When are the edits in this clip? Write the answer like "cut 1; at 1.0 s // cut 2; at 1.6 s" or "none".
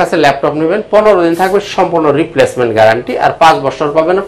none